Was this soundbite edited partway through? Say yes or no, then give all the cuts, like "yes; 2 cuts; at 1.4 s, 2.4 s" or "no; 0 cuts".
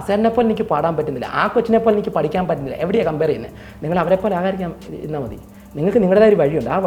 no; 0 cuts